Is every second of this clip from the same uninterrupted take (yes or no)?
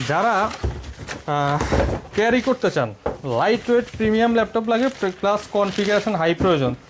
yes